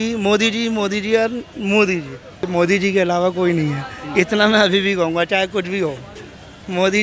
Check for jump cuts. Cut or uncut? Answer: cut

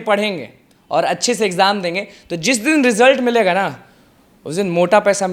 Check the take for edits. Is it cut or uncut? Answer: uncut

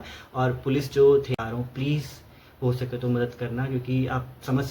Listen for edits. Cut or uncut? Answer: cut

